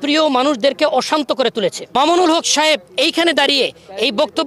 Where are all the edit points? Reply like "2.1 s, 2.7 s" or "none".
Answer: 1.8 s